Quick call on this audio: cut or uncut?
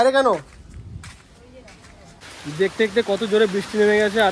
cut